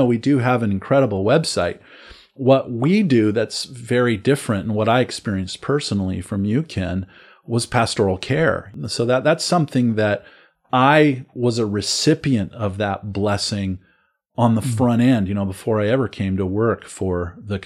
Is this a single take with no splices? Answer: no; 1 cut; at 8.7 s

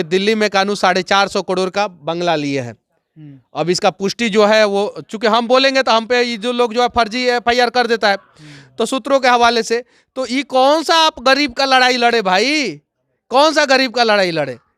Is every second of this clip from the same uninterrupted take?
yes; 0 cuts

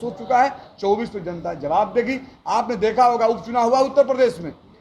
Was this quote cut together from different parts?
no; 0 cuts

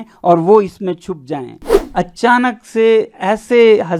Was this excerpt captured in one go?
no; 1 cut; at 1.7 s

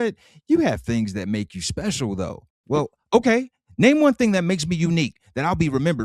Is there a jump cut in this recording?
no; 0 cuts

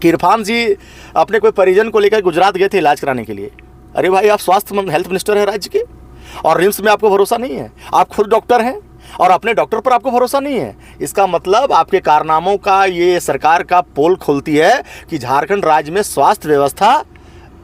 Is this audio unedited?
yes; 0 cuts

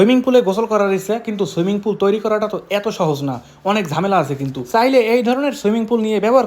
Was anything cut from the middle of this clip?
no; 0 cuts

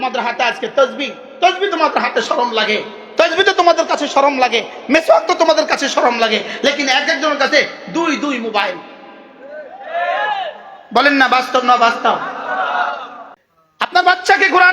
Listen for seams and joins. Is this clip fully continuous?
no; 1 cut; at 13.2 s

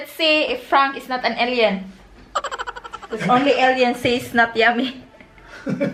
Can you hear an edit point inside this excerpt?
no; 0 cuts

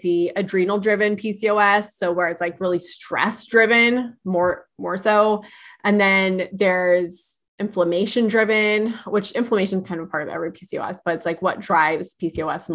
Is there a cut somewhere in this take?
no; 0 cuts

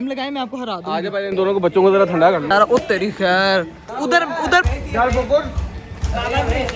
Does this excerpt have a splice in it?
yes; 2 cuts; at 2.5 s, 3.8 s

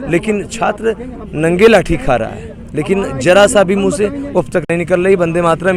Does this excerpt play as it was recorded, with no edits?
yes; 0 cuts

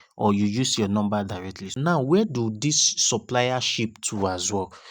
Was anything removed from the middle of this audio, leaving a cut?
yes; 1 cut; at 1.8 s

